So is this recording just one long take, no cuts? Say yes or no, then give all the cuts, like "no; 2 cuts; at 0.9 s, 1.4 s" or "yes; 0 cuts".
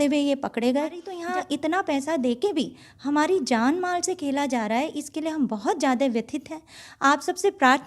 no; 1 cut; at 1.1 s